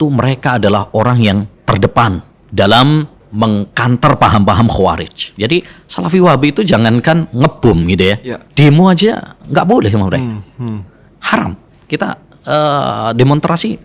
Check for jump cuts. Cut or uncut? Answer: cut